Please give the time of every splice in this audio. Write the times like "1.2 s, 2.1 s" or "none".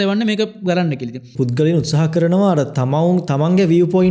1.3 s